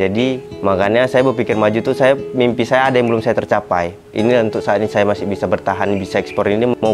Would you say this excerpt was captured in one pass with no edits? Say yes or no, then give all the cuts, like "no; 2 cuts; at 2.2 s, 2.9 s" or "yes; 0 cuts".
no; 1 cut; at 4.0 s